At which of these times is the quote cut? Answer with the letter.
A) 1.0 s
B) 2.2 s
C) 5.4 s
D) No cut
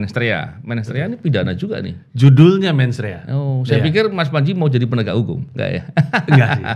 D